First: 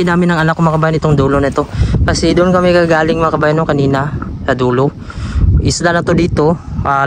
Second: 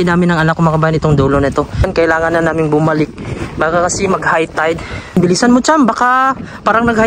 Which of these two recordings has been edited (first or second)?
second